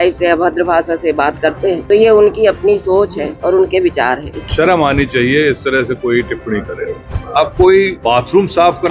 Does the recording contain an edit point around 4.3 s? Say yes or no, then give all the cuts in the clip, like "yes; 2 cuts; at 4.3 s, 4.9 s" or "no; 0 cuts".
yes; 4 cuts; at 1.8 s, 4.3 s, 7.1 s, 8.0 s